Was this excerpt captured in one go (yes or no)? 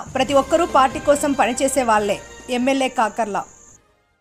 yes